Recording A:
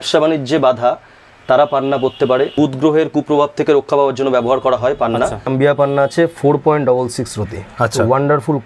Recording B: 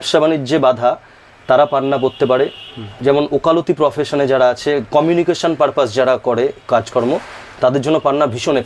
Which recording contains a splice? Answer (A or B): A